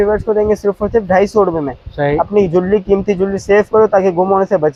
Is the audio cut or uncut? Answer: uncut